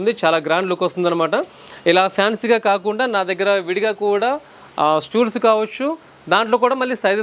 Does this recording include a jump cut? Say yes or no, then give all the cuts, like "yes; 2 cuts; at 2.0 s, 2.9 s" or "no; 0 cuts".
no; 0 cuts